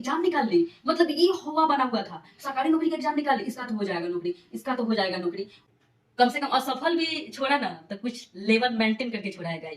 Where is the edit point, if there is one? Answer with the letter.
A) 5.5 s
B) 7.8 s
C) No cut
A